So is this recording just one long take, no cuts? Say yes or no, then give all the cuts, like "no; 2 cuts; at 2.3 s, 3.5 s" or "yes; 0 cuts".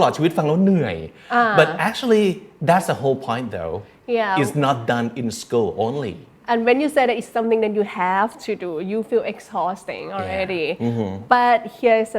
yes; 0 cuts